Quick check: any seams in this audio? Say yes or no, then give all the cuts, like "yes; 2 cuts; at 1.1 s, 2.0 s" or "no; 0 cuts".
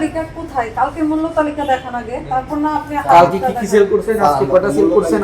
no; 0 cuts